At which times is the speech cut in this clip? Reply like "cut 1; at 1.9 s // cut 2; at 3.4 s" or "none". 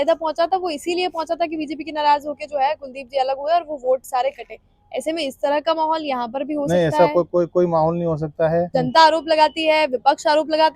cut 1; at 8.7 s